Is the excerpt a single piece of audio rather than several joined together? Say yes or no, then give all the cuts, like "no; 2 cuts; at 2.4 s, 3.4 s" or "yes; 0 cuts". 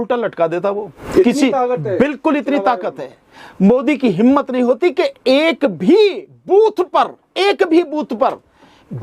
no; 1 cut; at 0.9 s